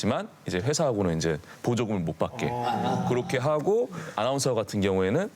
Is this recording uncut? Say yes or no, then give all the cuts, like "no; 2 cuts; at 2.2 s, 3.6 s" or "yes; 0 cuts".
no; 1 cut; at 4.1 s